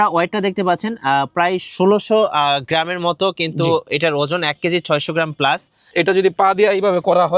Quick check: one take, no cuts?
no; 1 cut; at 5.9 s

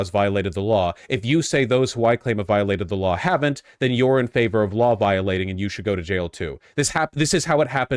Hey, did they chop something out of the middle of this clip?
no; 0 cuts

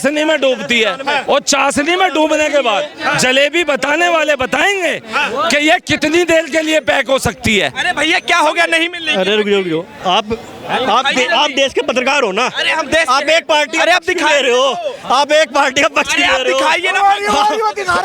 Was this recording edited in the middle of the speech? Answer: no; 0 cuts

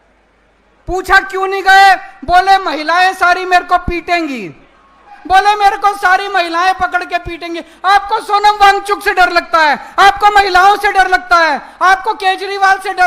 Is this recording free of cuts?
no; 1 cut; at 5.2 s

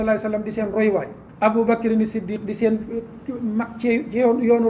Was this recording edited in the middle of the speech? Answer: yes; 1 cut; at 1.2 s

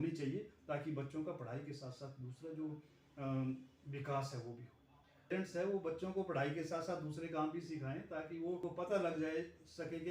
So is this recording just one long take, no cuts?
no; 2 cuts; at 5.3 s, 8.6 s

